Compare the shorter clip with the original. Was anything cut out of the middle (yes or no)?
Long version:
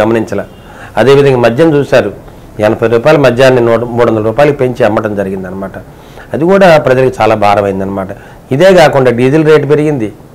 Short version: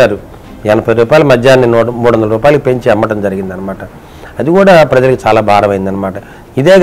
no